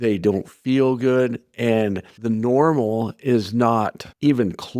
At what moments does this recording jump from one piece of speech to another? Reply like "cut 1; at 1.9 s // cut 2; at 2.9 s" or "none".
none

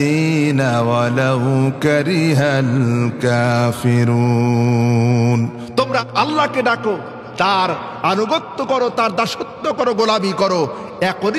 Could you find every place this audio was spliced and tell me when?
cut 1; at 6.0 s

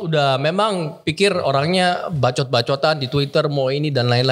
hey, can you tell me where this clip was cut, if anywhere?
none

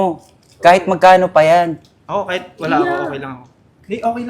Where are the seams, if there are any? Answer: cut 1; at 1.9 s

